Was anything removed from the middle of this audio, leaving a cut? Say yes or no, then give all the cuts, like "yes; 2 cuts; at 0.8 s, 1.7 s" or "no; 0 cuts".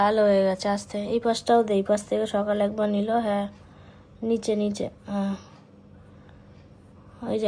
no; 0 cuts